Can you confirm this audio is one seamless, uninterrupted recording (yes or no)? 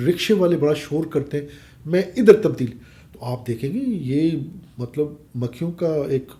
yes